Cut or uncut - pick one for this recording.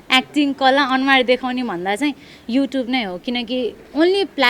uncut